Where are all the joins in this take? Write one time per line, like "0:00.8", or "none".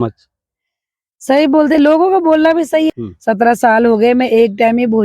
0:02.9